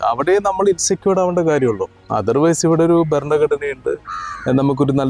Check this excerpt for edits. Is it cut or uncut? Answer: uncut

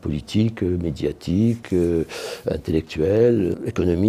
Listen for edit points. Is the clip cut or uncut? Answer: uncut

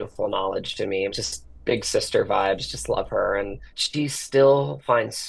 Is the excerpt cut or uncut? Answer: uncut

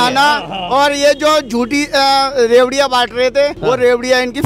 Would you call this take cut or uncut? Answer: cut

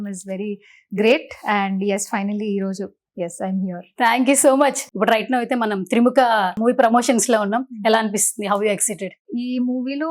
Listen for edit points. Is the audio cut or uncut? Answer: cut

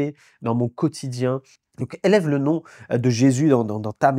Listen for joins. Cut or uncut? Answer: cut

